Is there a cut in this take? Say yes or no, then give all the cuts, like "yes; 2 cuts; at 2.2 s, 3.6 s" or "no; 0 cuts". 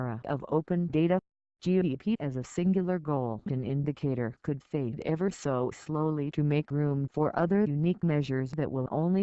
yes; 1 cut; at 4.7 s